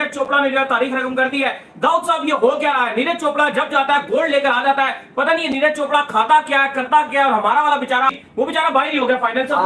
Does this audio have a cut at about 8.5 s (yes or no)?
no